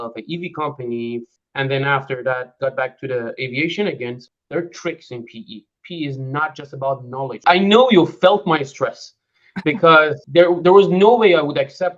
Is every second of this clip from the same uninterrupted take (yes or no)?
no